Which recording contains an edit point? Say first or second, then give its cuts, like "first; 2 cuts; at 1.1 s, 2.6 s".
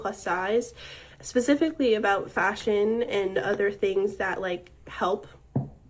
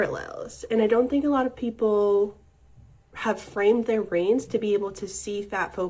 second; 1 cut; at 1.6 s